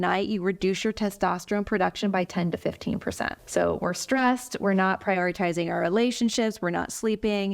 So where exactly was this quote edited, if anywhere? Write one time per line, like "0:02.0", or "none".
0:03.4